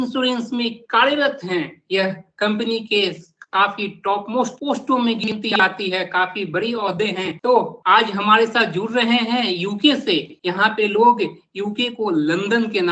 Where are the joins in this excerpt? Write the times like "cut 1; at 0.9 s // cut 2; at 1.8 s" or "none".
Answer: none